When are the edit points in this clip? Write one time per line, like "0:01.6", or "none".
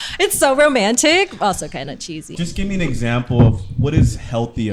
0:02.3